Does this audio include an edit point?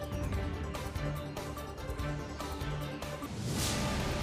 yes; 1 cut; at 3.2 s

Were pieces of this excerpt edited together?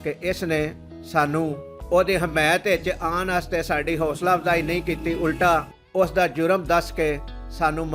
yes; 2 cuts; at 1.7 s, 5.8 s

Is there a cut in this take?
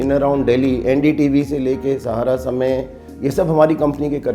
yes; 1 cut; at 3.2 s

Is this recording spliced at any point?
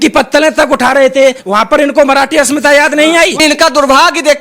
yes; 2 cuts; at 1.4 s, 3.4 s

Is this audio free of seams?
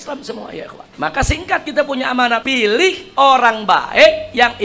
no; 2 cuts; at 0.9 s, 2.5 s

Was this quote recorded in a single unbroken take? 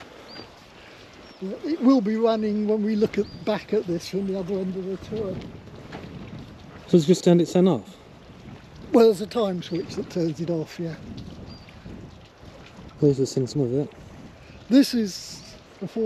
yes; 0 cuts

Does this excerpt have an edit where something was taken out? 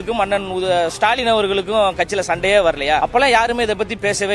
yes; 1 cut; at 3.0 s

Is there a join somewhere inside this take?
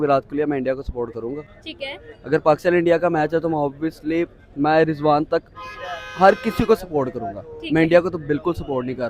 no; 0 cuts

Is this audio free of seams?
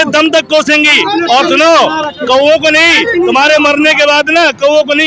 yes; 0 cuts

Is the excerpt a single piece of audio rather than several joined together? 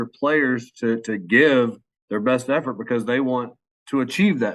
yes; 0 cuts

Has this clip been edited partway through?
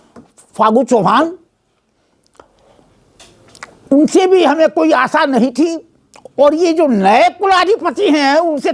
no; 0 cuts

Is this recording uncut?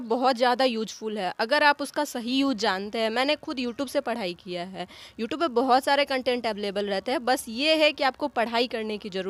yes; 0 cuts

